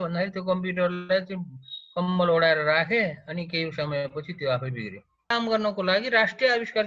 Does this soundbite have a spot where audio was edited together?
yes; 1 cut; at 5.3 s

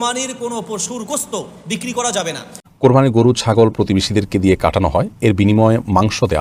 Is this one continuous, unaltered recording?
no; 1 cut; at 2.5 s

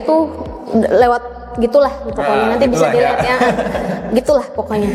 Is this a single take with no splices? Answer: yes; 0 cuts

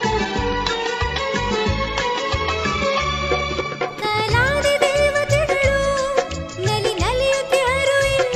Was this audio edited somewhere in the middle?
no; 0 cuts

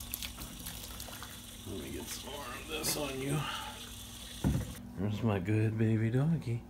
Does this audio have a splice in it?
yes; 1 cut; at 4.8 s

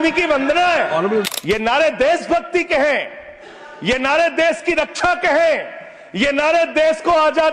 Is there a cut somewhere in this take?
yes; 1 cut; at 1.3 s

